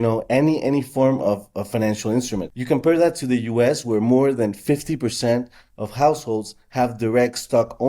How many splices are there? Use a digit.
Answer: 1